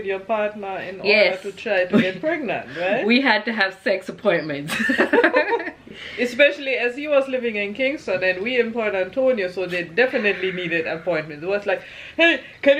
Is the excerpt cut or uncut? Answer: uncut